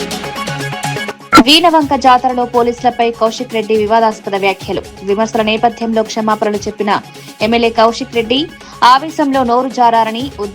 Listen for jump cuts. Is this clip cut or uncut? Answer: cut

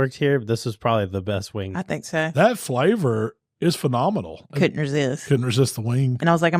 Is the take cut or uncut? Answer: cut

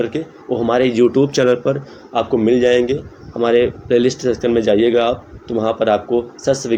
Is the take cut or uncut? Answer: uncut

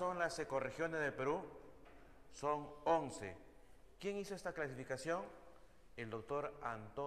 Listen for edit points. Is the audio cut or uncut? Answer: cut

